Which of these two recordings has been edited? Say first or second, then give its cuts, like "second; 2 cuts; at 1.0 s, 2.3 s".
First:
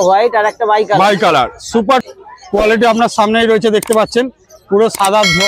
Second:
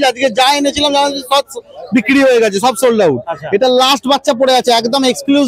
first; 1 cut; at 2.0 s